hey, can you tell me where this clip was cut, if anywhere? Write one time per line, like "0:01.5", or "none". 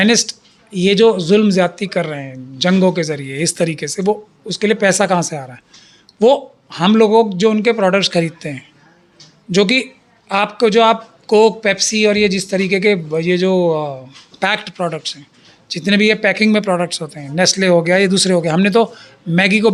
none